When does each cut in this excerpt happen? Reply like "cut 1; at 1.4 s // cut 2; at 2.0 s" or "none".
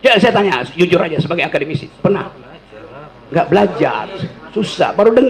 none